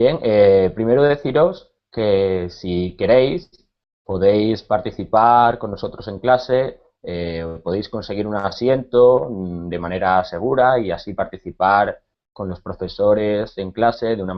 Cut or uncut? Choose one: uncut